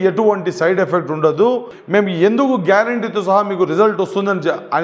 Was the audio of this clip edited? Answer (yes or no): yes